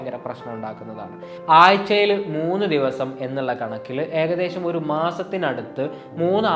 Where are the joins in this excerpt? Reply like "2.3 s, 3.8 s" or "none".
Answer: 1.3 s